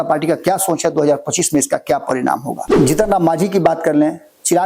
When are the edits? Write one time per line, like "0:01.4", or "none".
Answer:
0:02.6